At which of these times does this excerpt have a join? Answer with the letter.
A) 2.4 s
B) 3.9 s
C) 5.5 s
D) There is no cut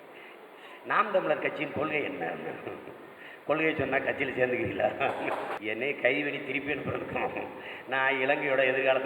C